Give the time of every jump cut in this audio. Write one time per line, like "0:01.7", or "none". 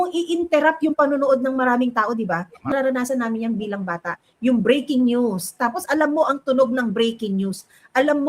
0:02.7